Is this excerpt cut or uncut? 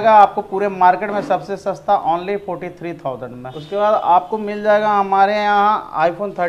uncut